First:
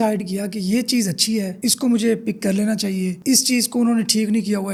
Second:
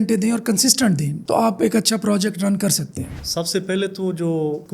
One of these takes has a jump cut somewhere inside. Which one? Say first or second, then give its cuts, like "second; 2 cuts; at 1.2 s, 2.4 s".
second; 2 cuts; at 1.1 s, 3.0 s